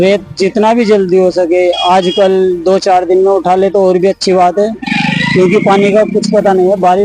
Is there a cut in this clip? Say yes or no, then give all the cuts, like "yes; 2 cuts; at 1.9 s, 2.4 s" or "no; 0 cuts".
no; 0 cuts